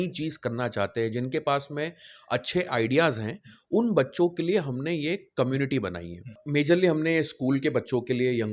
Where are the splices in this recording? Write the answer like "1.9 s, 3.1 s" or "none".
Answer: 6.4 s